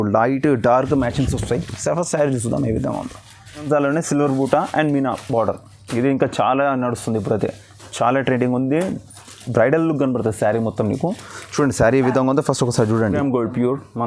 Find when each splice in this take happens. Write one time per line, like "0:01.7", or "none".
0:03.7
0:13.2

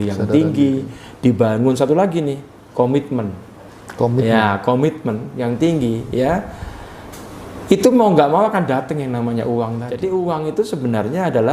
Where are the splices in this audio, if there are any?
0:09.9

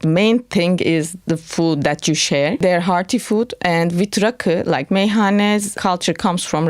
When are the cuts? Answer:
0:02.6
0:05.8

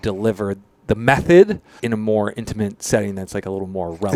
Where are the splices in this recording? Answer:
none

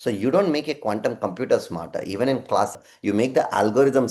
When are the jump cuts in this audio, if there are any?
0:02.8

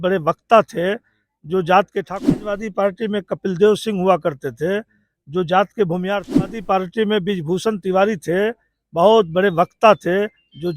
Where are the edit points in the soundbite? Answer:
0:02.6
0:06.6

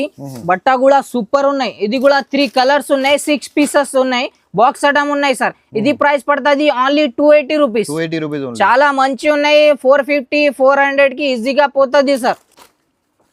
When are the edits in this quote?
none

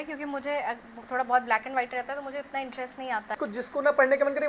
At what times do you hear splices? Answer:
0:03.4

